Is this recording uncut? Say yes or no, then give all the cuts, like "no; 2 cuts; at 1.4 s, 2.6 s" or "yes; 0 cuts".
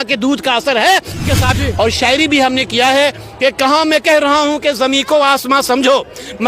no; 1 cut; at 1.6 s